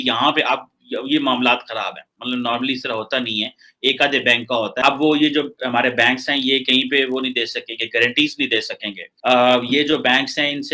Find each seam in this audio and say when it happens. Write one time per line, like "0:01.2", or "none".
0:04.8